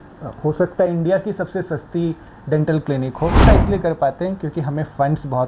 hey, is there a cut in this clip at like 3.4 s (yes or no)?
yes